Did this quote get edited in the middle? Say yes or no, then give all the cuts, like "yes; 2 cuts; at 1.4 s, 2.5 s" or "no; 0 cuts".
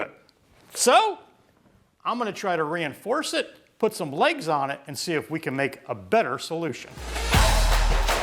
yes; 1 cut; at 7.2 s